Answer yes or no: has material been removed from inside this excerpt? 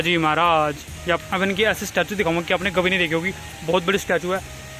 yes